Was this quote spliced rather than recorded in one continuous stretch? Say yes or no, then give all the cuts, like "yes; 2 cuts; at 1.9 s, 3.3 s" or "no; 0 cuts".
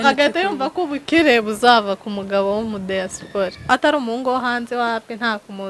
yes; 1 cut; at 3.7 s